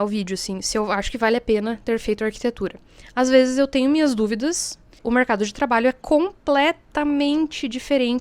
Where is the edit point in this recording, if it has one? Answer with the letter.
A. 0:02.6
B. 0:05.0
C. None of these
B